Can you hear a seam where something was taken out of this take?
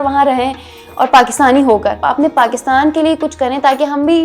yes; 1 cut; at 2.0 s

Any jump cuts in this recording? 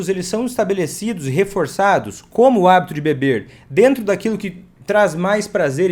no; 0 cuts

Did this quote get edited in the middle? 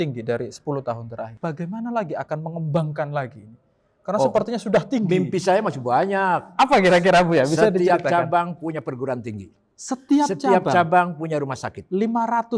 yes; 1 cut; at 1.3 s

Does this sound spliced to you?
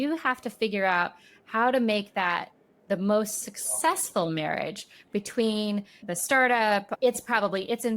yes; 2 cuts; at 6.0 s, 6.9 s

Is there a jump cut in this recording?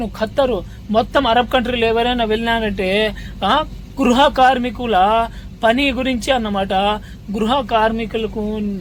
no; 0 cuts

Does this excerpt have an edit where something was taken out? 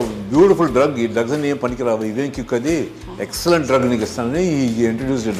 no; 0 cuts

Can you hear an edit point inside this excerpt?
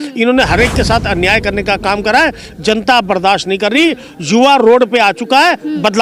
no; 0 cuts

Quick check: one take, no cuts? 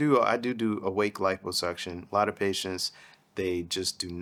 yes; 0 cuts

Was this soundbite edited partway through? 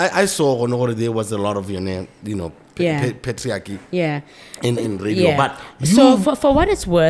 no; 0 cuts

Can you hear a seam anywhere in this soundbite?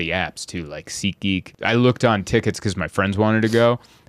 yes; 1 cut; at 1.5 s

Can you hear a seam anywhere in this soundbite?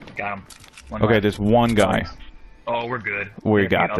no; 0 cuts

